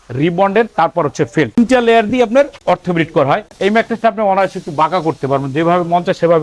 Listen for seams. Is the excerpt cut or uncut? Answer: cut